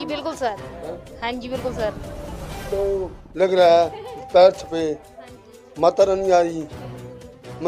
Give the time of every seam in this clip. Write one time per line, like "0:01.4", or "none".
none